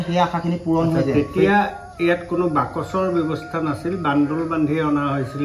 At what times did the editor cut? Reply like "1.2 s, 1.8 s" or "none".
1.1 s